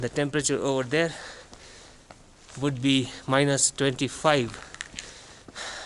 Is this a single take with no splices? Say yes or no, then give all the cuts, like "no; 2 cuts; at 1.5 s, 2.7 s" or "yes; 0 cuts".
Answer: yes; 0 cuts